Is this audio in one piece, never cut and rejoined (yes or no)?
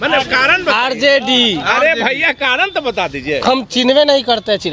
yes